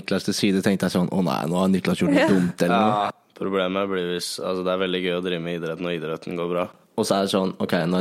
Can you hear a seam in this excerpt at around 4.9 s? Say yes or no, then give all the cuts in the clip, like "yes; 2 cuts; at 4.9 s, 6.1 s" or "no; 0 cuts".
no; 2 cuts; at 3.2 s, 6.8 s